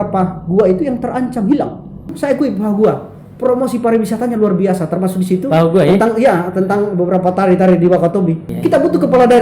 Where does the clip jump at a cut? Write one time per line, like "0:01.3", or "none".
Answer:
0:02.1
0:08.5